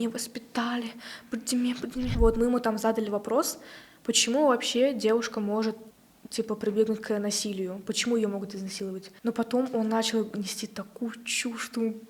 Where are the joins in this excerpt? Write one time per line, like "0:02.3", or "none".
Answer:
0:02.1
0:05.9
0:09.1